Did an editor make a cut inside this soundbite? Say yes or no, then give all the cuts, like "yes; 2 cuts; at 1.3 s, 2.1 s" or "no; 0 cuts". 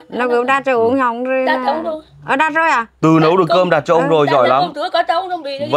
no; 0 cuts